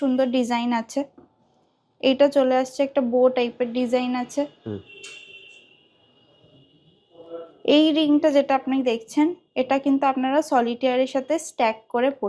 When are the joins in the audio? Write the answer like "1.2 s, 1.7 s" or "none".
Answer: none